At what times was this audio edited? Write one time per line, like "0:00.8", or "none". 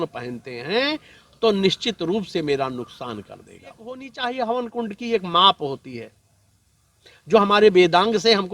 0:04.1

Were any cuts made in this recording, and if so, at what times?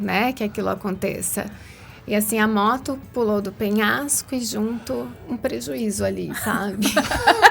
0:05.2

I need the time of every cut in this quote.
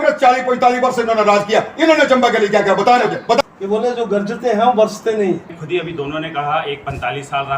0:03.4
0:05.6

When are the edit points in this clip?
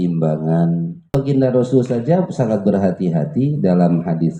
0:01.1

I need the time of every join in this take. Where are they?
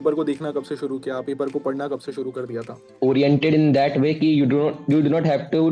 0:02.8

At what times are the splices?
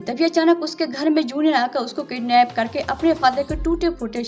none

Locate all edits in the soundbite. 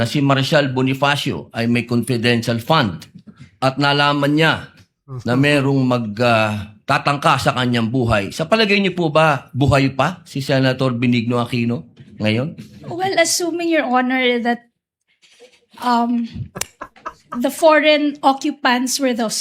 none

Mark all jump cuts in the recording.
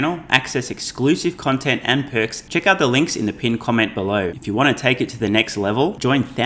0:02.4
0:04.4

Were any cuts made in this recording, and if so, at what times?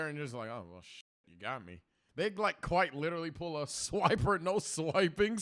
0:01.9

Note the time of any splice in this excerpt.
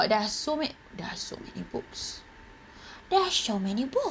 none

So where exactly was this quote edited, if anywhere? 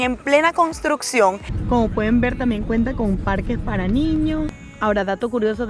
0:01.5
0:04.5

